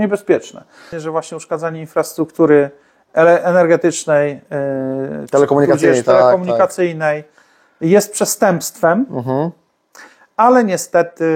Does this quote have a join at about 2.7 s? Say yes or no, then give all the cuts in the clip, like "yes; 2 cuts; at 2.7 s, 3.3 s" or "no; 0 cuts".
no; 1 cut; at 1.0 s